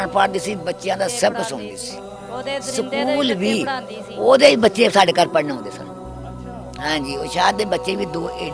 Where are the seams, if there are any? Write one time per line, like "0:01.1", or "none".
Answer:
none